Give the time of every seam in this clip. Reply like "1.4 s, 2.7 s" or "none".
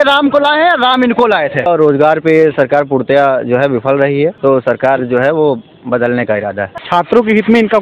1.7 s, 4.4 s, 6.8 s

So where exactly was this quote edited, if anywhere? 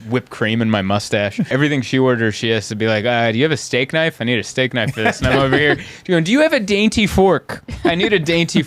1.5 s

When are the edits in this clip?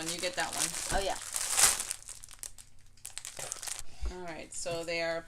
3.8 s

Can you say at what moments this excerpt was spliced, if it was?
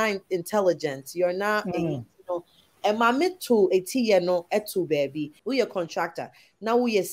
5.3 s

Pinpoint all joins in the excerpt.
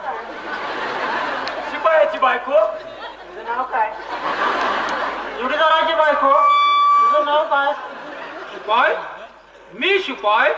none

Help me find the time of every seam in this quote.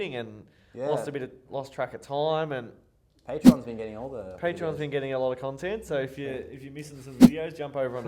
none

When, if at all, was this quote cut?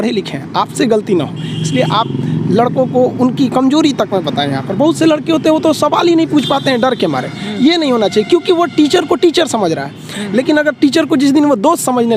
none

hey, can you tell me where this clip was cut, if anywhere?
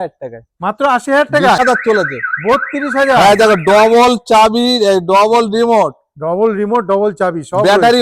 1.6 s

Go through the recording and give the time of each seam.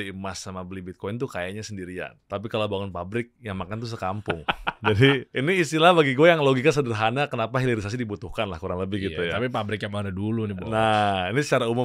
2.2 s, 5.3 s

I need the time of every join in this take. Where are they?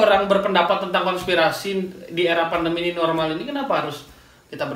none

